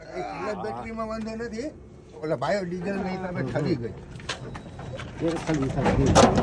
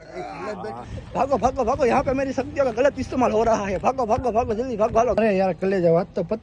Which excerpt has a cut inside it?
second; 3 cuts; at 0.9 s, 3.8 s, 5.2 s

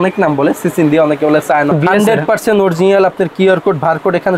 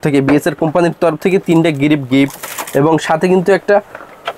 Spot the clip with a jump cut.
first; 1 cut; at 1.7 s

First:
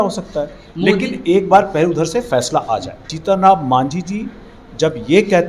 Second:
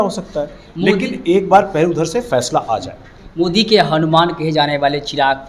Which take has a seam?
first; 1 cut; at 3.0 s

